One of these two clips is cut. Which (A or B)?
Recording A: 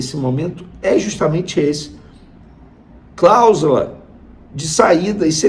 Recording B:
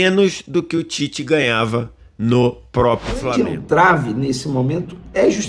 B